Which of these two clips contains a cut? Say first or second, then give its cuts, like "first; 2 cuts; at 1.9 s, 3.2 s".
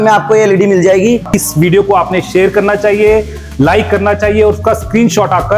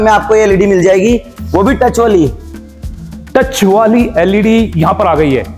first; 1 cut; at 1.3 s